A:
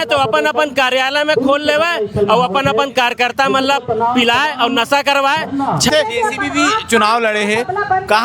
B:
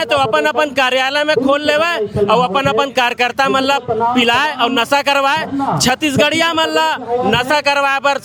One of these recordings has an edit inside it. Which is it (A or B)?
A